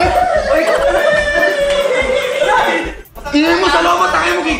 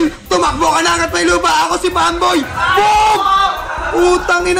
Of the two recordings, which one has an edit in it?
first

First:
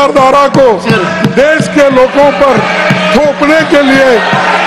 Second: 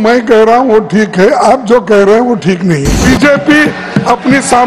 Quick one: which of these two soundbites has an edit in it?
second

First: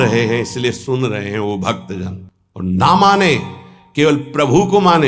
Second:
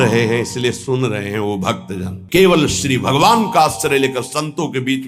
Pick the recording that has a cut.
second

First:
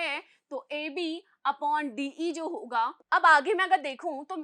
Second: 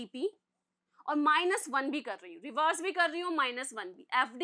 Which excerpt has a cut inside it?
first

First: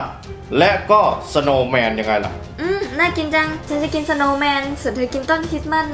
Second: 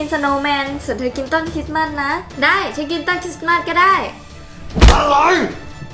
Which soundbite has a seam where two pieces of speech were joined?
first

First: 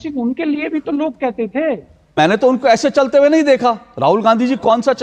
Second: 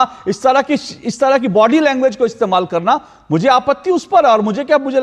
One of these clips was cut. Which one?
first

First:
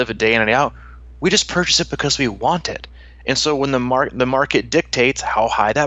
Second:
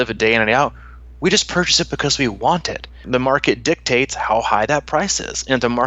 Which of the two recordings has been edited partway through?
second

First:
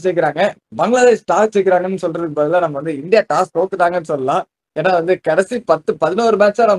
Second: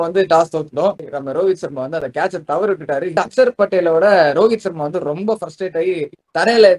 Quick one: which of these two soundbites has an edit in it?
second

